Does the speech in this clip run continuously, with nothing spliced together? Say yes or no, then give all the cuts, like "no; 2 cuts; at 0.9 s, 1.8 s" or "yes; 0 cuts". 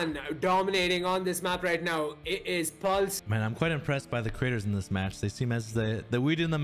yes; 0 cuts